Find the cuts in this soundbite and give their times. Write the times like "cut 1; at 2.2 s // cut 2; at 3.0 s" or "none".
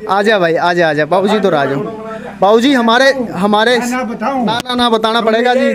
none